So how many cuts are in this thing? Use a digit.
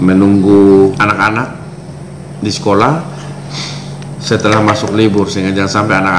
1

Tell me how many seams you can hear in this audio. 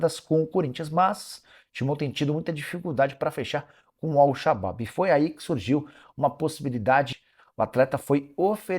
1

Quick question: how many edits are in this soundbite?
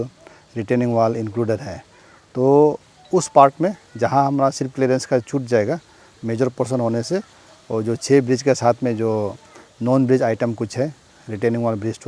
0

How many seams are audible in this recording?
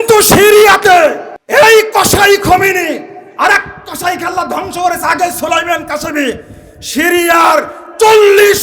1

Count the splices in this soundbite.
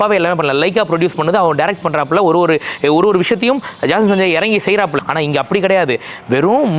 1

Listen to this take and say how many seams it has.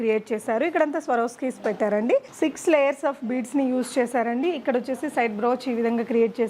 1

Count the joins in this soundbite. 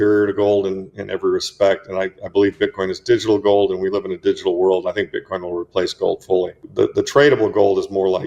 1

